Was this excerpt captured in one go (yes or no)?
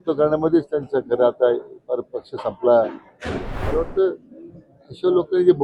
no